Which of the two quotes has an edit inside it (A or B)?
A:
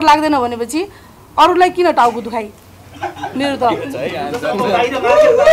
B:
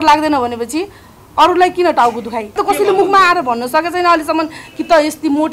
B